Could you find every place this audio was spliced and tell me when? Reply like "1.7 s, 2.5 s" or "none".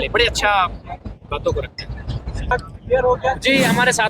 2.5 s

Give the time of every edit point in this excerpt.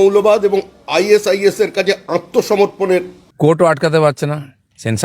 3.2 s

